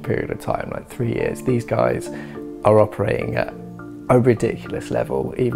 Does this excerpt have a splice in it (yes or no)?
no